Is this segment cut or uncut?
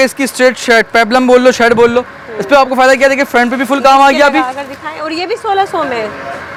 uncut